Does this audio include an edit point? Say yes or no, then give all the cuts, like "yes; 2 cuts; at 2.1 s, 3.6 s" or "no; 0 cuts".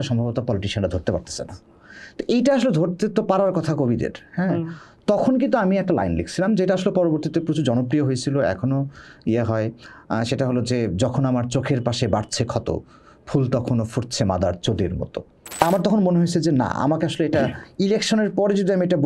yes; 1 cut; at 15.6 s